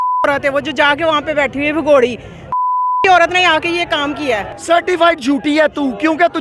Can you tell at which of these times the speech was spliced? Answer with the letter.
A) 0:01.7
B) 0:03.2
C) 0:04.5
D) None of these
C